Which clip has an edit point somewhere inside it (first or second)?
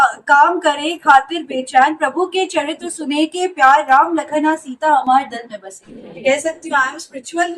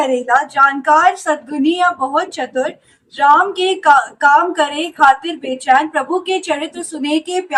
first